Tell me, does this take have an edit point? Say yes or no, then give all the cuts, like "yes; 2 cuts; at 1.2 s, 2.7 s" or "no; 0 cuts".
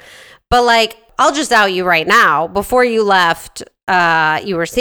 yes; 1 cut; at 1.0 s